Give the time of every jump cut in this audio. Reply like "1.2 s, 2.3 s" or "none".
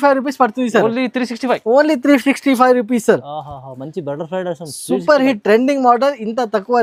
none